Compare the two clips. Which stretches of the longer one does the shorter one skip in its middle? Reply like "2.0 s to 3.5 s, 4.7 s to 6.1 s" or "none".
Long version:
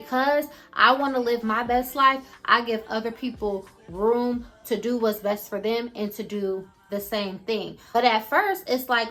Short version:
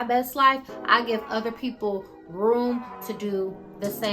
4.6 s to 6.1 s